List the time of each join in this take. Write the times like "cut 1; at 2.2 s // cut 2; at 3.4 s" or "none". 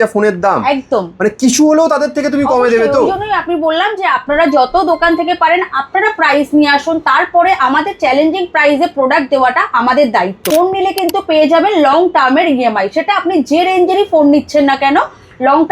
cut 1; at 10.4 s